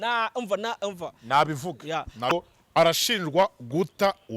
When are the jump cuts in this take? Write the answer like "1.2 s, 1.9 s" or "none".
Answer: 2.3 s

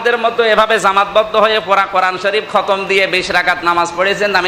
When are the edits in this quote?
none

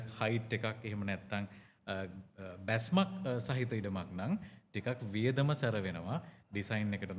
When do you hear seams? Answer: none

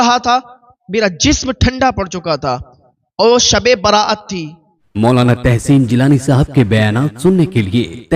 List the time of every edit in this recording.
4.9 s

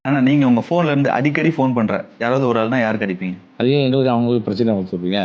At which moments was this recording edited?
3.4 s

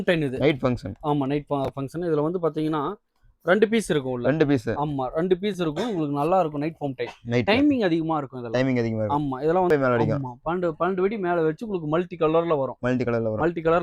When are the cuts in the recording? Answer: 9.7 s

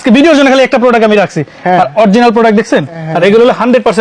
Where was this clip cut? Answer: 3.0 s

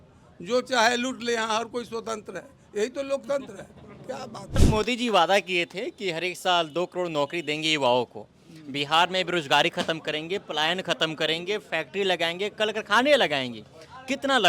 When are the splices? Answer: 4.6 s

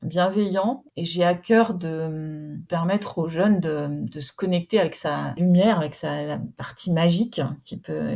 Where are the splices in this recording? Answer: 0.9 s, 2.6 s, 5.4 s

